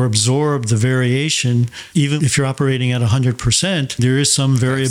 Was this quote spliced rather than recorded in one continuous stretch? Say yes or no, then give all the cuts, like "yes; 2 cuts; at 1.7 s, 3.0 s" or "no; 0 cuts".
yes; 1 cut; at 1.8 s